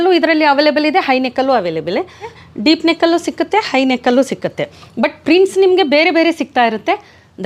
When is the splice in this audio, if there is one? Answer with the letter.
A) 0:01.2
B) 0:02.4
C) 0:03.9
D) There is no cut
B